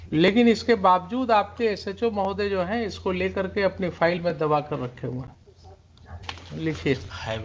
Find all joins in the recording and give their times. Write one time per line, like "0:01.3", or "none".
0:06.1